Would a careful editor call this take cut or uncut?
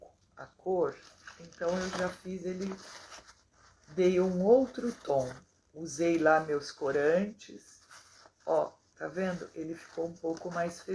uncut